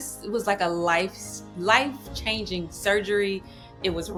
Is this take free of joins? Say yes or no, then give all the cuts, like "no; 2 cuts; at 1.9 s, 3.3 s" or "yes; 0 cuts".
yes; 0 cuts